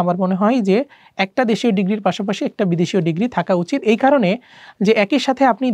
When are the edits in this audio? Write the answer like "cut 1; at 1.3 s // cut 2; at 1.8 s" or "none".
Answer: none